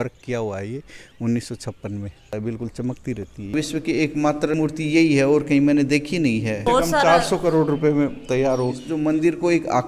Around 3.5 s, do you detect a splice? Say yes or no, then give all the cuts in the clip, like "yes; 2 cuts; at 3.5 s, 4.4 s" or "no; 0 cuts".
yes; 5 cuts; at 2.3 s, 3.5 s, 4.5 s, 6.6 s, 8.9 s